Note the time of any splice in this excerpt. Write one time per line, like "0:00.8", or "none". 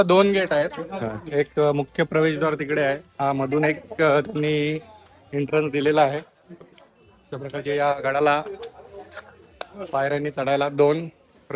none